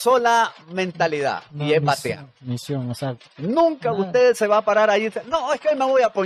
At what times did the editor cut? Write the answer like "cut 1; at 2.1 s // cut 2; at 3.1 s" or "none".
none